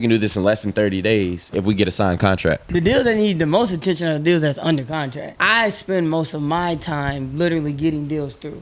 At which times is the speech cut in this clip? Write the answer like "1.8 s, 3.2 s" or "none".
2.6 s, 5.2 s